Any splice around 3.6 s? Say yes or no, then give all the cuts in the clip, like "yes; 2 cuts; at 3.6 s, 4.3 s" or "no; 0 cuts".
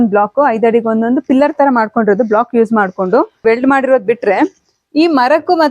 yes; 1 cut; at 3.6 s